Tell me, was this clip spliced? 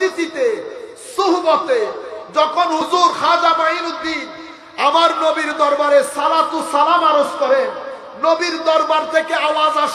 yes; 1 cut; at 2.9 s

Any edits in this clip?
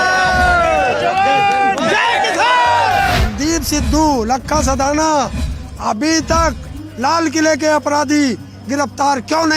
yes; 1 cut; at 3.2 s

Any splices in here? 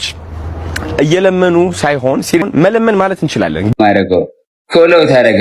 yes; 2 cuts; at 2.4 s, 3.7 s

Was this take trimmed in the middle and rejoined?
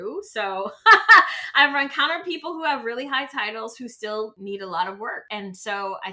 yes; 2 cuts; at 4.4 s, 5.2 s

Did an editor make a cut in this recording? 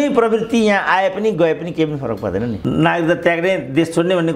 yes; 1 cut; at 2.6 s

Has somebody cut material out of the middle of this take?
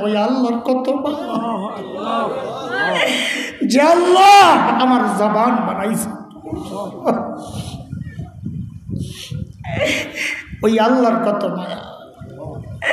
no; 0 cuts

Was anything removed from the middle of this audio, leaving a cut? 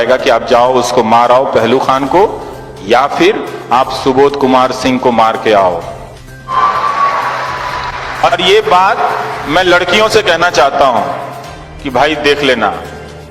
yes; 1 cut; at 6.3 s

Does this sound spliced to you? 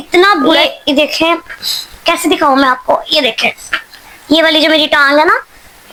no; 0 cuts

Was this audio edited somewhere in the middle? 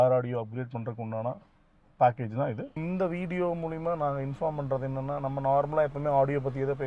yes; 1 cut; at 2.7 s

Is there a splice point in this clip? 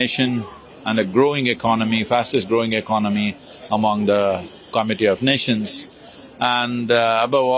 no; 0 cuts

